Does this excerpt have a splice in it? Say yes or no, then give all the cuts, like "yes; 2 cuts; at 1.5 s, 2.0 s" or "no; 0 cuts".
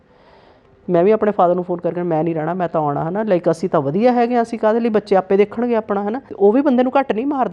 yes; 1 cut; at 6.2 s